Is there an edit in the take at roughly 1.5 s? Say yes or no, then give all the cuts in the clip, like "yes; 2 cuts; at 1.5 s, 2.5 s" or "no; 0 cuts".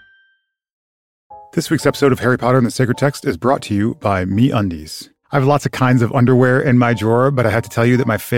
yes; 1 cut; at 1.5 s